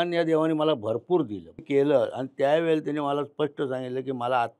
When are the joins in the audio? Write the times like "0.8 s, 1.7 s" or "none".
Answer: 1.6 s